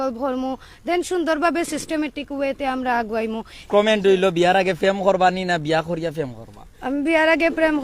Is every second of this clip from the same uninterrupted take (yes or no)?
no